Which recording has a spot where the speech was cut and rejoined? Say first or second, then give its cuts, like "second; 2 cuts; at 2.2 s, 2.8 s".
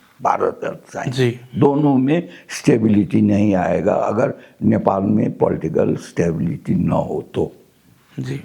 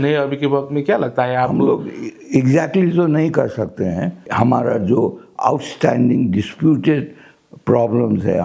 second; 1 cut; at 4.2 s